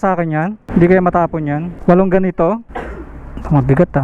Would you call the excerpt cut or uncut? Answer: uncut